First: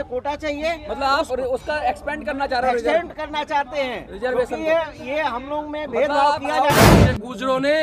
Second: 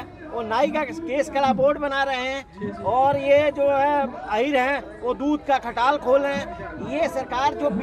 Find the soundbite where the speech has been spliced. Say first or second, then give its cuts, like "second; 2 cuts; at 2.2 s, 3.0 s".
first; 1 cut; at 6.9 s